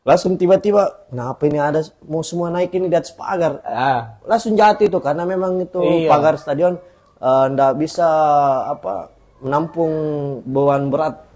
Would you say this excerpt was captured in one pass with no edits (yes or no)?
yes